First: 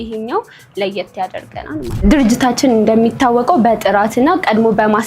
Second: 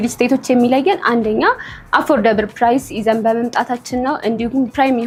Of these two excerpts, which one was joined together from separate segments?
first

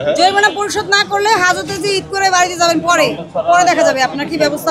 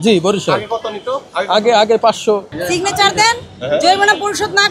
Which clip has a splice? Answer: second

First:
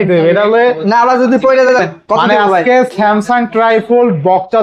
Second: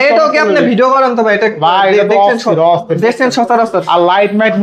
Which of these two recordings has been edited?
first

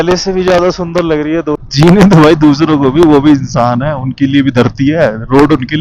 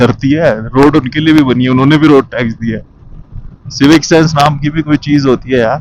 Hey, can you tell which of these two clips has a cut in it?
first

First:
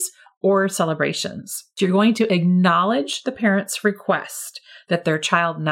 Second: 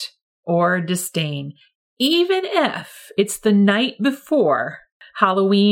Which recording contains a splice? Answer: first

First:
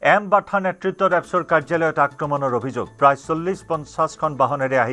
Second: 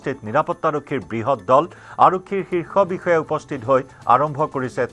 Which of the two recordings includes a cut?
second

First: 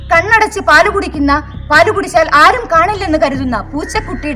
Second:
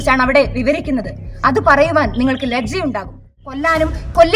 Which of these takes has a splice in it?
second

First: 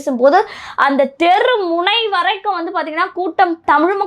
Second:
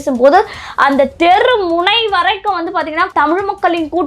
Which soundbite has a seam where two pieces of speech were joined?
second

